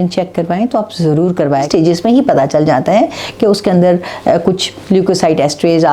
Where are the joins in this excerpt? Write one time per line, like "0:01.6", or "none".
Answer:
0:01.7